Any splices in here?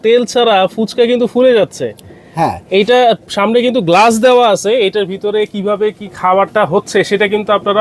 no; 0 cuts

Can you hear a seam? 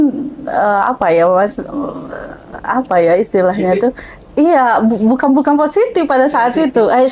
no; 0 cuts

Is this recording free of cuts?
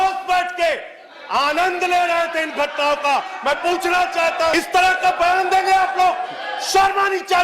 no; 1 cut; at 4.5 s

